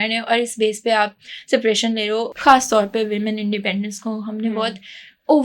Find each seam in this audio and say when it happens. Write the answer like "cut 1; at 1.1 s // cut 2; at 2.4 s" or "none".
cut 1; at 2.3 s